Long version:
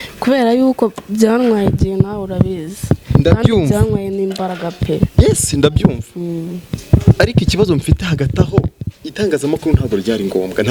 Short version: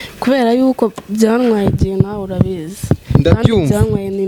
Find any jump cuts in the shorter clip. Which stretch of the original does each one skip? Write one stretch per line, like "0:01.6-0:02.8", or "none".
none